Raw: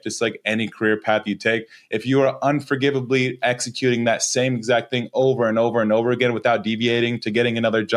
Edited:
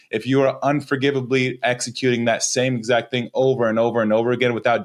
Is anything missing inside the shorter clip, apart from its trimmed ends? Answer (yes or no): no